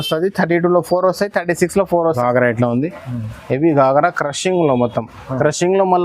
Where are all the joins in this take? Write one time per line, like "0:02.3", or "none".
0:02.2